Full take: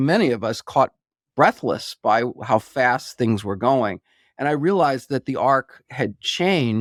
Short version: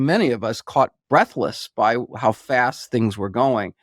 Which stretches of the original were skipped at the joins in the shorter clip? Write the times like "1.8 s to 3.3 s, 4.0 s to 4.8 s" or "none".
1.0 s to 1.3 s